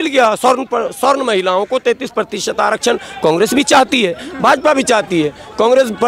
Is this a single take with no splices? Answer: yes; 0 cuts

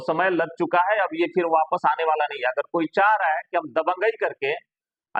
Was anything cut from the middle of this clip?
no; 0 cuts

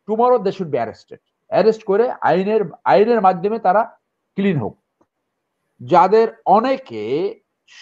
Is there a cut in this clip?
yes; 1 cut; at 5.1 s

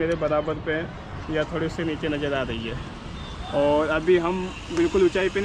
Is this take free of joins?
yes; 0 cuts

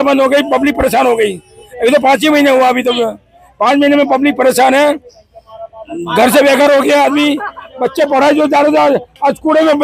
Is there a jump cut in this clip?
no; 0 cuts

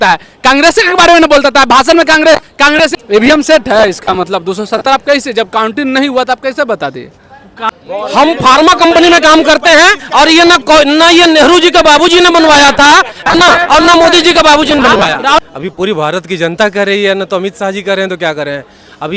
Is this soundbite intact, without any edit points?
no; 3 cuts; at 2.9 s, 7.7 s, 15.4 s

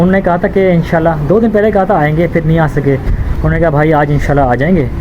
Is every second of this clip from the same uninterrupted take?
no; 1 cut; at 3.2 s

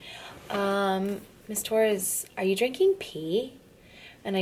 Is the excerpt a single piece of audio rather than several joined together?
yes; 0 cuts

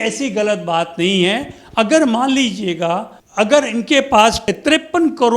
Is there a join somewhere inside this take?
no; 0 cuts

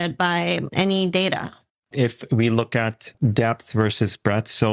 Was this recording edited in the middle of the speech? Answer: yes; 2 cuts; at 1.7 s, 3.0 s

